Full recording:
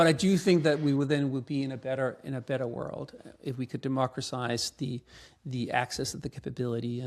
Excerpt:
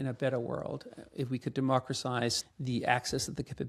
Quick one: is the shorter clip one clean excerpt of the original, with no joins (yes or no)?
no